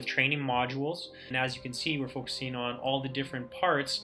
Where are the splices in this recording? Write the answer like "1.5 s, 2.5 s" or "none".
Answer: 1.3 s

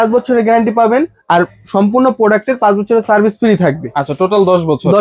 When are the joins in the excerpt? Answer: none

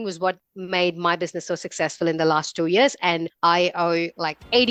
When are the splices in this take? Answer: none

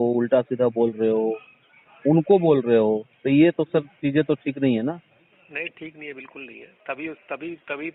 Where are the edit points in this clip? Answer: none

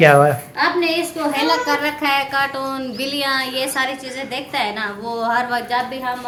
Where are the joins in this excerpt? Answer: none

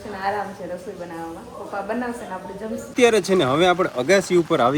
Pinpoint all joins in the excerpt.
none

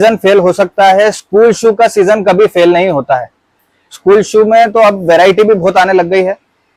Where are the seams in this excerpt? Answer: none

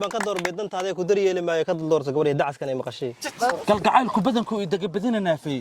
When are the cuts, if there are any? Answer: 3.6 s

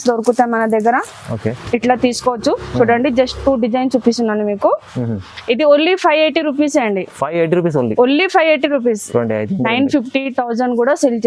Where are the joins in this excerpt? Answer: none

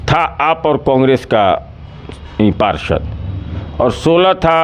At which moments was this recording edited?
none

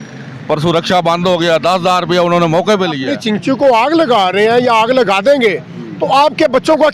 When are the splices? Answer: 3.1 s

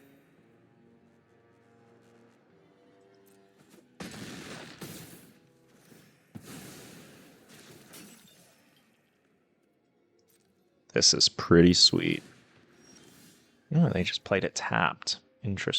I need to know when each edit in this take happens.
12.4 s

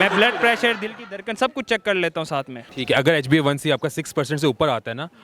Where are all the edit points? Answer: 2.5 s

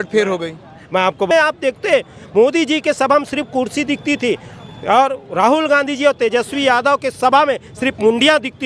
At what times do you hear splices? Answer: 1.3 s

